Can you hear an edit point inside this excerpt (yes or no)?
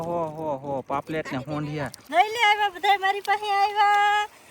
yes